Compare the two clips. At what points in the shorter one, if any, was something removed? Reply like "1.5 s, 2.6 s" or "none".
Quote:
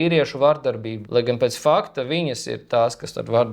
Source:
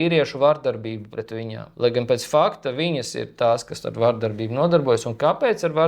0.9 s